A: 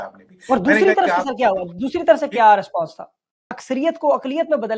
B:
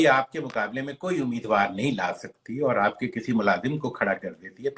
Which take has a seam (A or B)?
A